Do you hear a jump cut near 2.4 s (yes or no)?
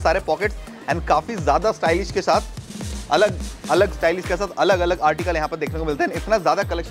no